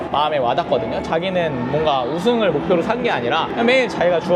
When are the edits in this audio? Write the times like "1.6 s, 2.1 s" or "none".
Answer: none